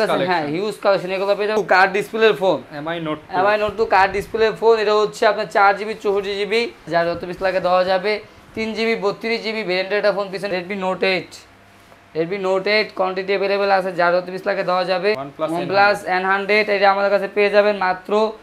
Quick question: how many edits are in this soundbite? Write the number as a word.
four